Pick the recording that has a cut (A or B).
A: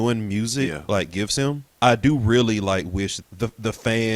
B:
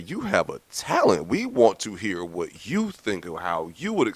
A